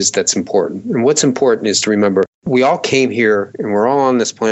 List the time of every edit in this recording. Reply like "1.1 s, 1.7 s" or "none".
none